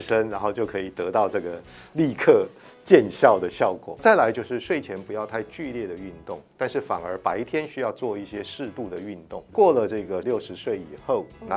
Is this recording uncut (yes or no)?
no